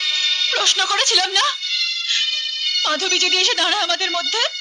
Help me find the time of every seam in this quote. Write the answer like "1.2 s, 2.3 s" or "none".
none